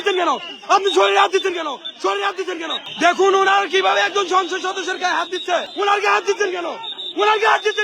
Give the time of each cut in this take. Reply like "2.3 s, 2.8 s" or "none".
2.8 s, 5.7 s